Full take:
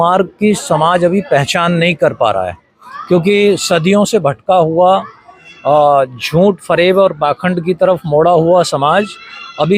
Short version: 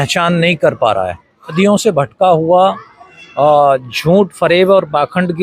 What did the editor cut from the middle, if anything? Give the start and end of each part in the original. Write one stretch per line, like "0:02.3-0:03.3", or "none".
0:02.9-0:03.8